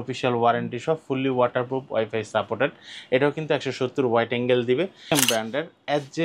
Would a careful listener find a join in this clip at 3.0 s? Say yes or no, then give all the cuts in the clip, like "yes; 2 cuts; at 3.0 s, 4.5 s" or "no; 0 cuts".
no; 1 cut; at 5.1 s